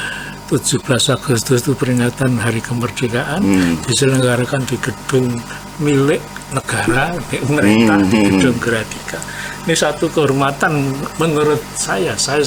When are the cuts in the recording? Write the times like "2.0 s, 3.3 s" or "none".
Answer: none